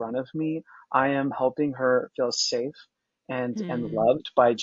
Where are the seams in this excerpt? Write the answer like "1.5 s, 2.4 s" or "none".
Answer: none